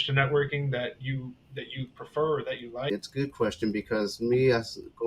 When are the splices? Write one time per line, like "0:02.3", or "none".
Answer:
0:02.9